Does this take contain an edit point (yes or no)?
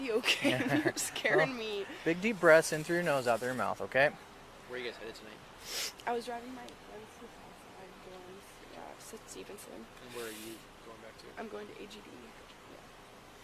no